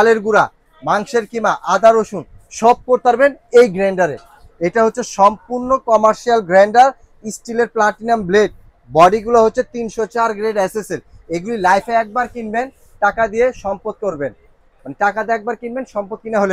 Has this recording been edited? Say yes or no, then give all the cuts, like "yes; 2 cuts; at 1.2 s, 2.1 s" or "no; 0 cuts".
no; 0 cuts